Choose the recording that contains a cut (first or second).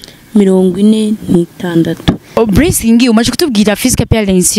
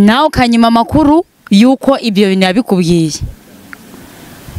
first